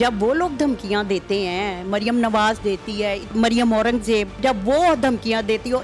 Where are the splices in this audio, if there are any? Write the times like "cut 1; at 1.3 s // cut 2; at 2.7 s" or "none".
cut 1; at 3.3 s // cut 2; at 4.4 s